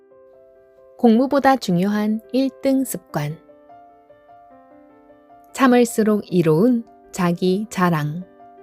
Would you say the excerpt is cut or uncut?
cut